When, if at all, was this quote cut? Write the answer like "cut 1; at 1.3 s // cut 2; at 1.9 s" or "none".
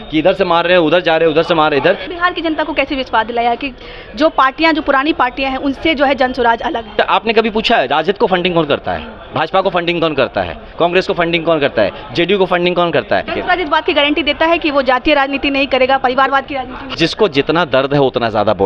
cut 1; at 2.1 s // cut 2; at 6.9 s // cut 3; at 13.3 s // cut 4; at 16.8 s